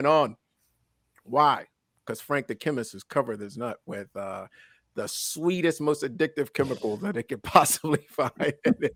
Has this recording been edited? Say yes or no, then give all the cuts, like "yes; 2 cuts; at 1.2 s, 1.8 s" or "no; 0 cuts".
no; 0 cuts